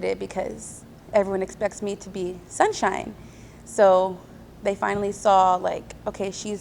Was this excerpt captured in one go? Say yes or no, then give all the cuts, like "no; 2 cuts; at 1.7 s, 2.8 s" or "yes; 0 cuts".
yes; 0 cuts